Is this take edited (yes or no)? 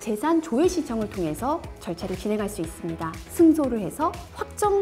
yes